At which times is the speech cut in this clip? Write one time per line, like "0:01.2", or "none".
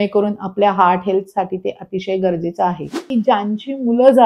0:03.0